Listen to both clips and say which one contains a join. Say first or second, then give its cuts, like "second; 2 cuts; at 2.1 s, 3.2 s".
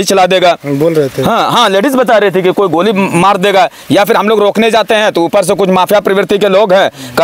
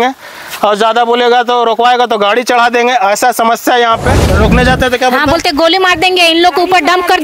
second; 1 cut; at 4.3 s